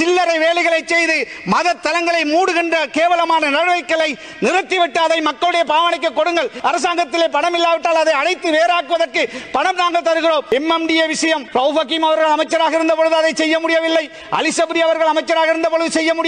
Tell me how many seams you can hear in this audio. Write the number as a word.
three